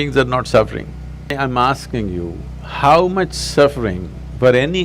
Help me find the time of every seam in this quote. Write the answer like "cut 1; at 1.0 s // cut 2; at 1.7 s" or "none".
cut 1; at 1.3 s